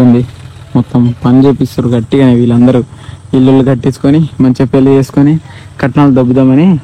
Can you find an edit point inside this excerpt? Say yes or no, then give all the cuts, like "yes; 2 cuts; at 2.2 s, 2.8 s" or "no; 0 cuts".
no; 0 cuts